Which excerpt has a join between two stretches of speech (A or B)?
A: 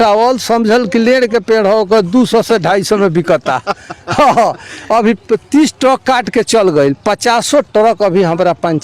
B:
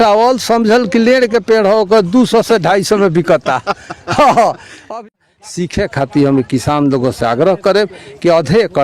B